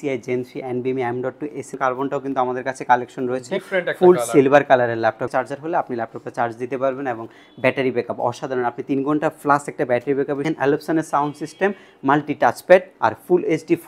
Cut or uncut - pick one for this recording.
cut